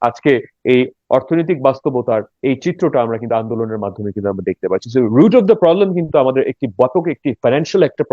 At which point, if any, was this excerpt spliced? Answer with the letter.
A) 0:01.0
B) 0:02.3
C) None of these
B